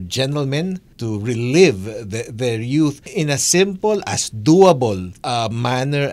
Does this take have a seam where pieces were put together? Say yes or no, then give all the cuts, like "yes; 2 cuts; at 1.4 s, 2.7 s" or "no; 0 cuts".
yes; 3 cuts; at 0.9 s, 3.1 s, 5.1 s